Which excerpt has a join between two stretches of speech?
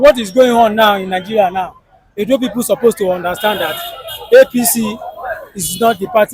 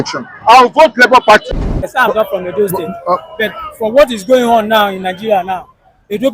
second; 1 cut; at 1.9 s

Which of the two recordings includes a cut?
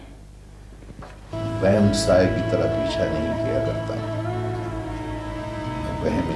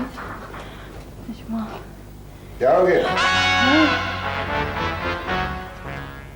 first; 1 cut; at 1.3 s

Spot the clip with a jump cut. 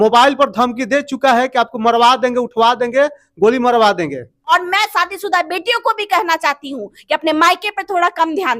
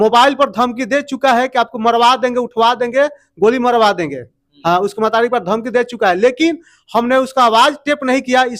first; 1 cut; at 4.5 s

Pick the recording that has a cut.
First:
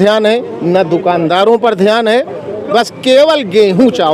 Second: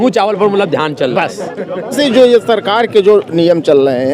second; 1 cut; at 1.9 s

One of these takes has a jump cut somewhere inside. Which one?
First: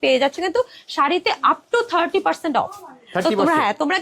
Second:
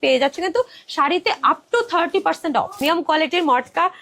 second; 1 cut; at 2.8 s

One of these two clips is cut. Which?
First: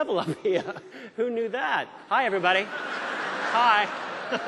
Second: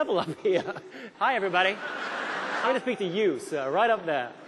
second; 2 cuts; at 1.0 s, 2.6 s

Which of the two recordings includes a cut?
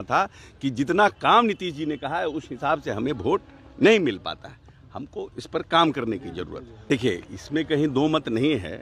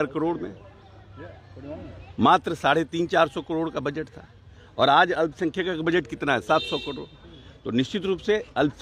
first; 1 cut; at 6.7 s

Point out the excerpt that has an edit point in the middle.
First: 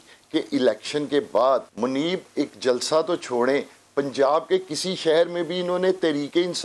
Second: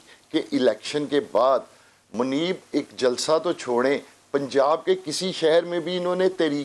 first; 1 cut; at 1.7 s

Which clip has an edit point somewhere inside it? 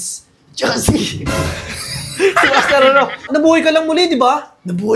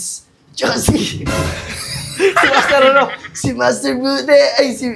first; 1 cut; at 3.3 s

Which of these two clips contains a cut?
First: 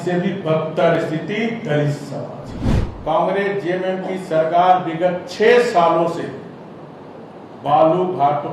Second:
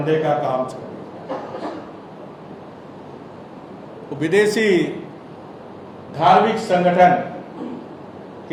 first; 1 cut; at 2.9 s

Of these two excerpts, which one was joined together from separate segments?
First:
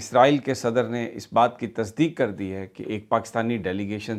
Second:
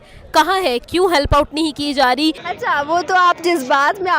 second; 1 cut; at 2.5 s

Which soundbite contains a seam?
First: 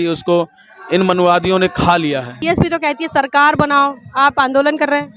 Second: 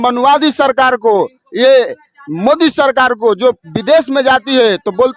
first; 1 cut; at 2.3 s

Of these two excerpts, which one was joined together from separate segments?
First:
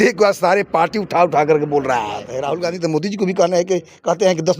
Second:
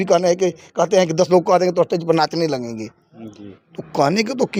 first; 1 cut; at 2.3 s

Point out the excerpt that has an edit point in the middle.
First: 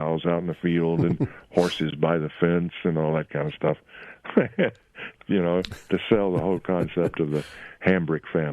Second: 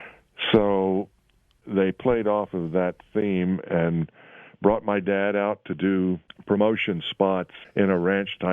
second; 3 cuts; at 1.6 s, 6.3 s, 7.6 s

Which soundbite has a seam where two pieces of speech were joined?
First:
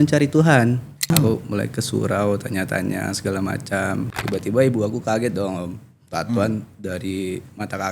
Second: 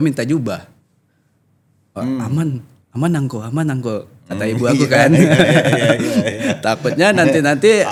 first; 2 cuts; at 1.1 s, 4.1 s

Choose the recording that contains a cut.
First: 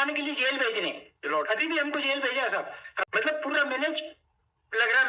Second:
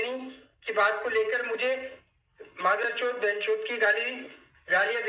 first; 1 cut; at 3.0 s

